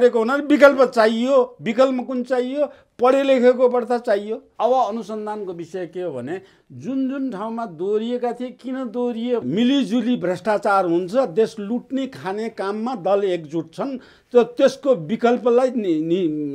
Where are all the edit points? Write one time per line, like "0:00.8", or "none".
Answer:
0:04.4
0:09.4